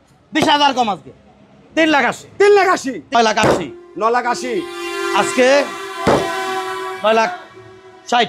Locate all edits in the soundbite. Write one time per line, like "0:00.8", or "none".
0:03.1